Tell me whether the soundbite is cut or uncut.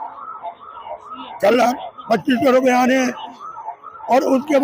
uncut